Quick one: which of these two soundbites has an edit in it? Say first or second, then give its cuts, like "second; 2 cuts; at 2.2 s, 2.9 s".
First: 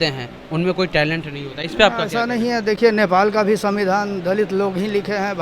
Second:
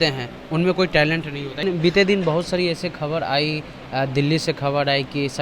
second; 1 cut; at 1.6 s